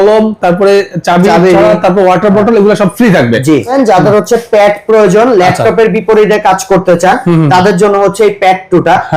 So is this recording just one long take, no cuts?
no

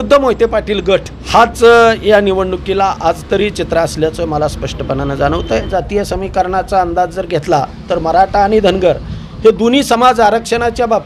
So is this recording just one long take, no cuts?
no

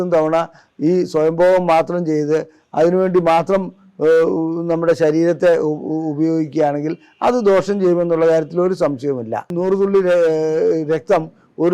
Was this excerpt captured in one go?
no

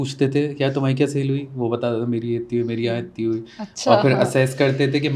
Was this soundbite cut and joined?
no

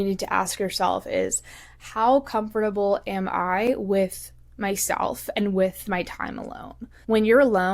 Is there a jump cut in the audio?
yes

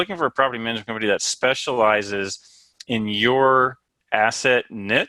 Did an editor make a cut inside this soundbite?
no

